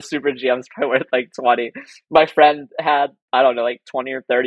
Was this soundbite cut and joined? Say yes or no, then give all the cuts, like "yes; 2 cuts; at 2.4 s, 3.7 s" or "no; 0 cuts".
no; 0 cuts